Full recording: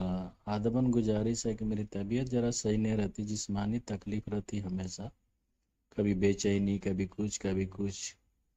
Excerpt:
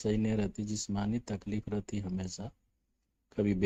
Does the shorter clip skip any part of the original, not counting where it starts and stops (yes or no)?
no